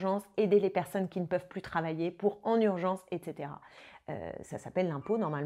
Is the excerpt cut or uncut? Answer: uncut